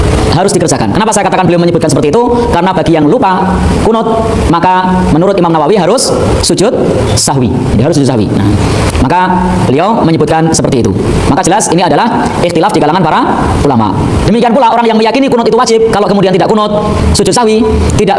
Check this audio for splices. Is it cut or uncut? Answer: uncut